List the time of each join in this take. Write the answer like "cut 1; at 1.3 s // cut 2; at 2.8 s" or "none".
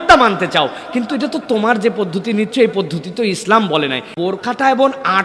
cut 1; at 4.1 s